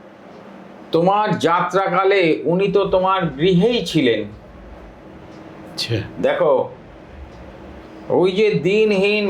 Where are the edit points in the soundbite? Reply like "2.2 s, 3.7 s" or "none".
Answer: none